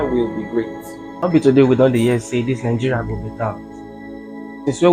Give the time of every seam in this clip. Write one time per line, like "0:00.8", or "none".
0:01.2